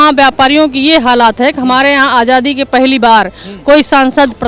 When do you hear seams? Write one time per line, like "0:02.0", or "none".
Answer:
none